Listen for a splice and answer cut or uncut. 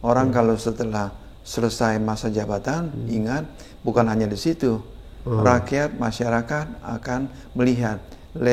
uncut